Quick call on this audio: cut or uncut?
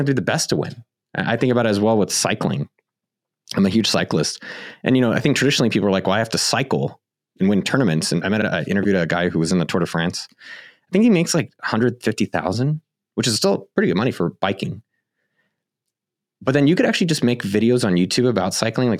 cut